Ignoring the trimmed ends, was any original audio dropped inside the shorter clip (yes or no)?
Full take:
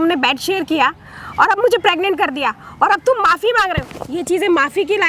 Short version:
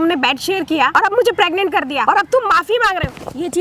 yes